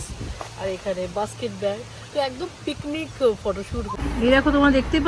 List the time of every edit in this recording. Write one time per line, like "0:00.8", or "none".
0:04.0